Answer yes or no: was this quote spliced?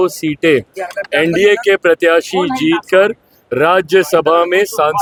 no